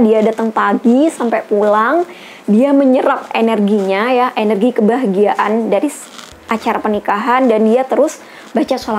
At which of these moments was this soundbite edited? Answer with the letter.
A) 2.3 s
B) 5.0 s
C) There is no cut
C